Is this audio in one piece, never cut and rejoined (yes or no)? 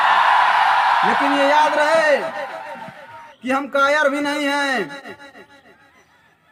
yes